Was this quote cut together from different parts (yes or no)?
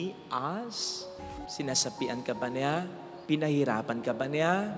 yes